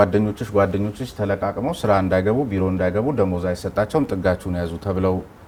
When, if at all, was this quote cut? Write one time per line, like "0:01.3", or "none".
none

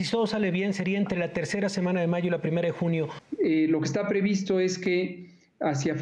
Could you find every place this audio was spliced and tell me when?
0:03.2

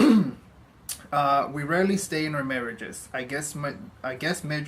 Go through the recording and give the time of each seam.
0:01.9

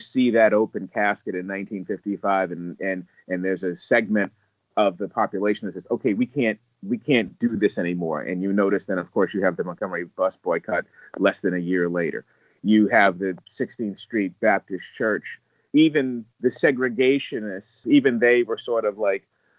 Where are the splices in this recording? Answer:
0:15.5
0:17.8

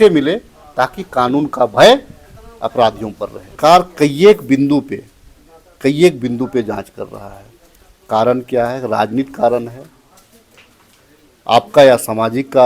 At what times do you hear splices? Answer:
0:03.5

